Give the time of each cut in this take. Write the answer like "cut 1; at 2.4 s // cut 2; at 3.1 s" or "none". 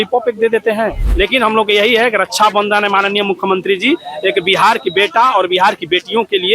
cut 1; at 1.0 s